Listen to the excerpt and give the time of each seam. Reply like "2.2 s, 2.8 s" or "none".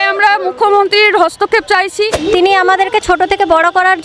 2.1 s